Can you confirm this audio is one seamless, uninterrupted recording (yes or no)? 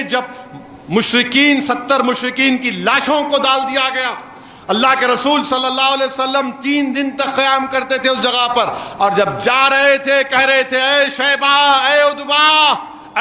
yes